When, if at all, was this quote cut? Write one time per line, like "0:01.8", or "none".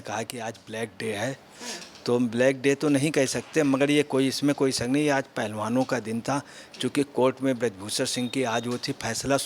none